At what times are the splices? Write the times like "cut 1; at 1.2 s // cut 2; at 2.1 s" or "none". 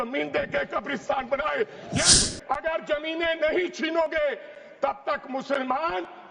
cut 1; at 2.2 s